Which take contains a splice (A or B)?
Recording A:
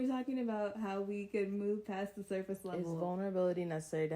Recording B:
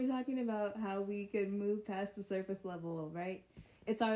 A